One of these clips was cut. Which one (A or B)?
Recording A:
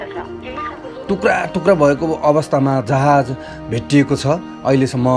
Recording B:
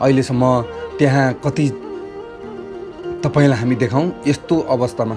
B